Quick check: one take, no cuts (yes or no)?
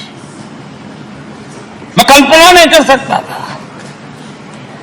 no